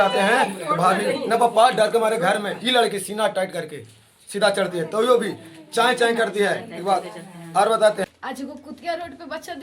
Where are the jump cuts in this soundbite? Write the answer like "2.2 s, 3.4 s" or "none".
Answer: 8.1 s